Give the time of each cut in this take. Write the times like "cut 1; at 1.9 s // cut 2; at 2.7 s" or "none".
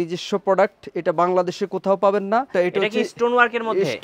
cut 1; at 2.5 s